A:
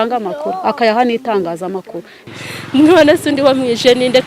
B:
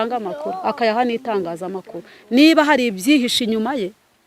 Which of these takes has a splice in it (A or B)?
A